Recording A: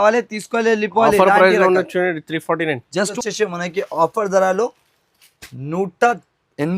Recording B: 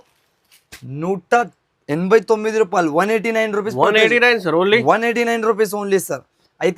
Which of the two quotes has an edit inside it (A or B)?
A